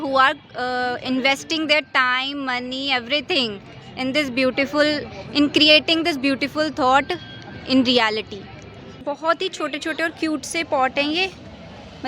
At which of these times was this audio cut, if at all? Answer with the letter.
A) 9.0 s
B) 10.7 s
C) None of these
A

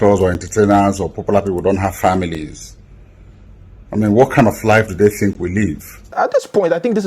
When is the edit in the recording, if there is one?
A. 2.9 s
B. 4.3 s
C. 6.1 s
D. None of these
C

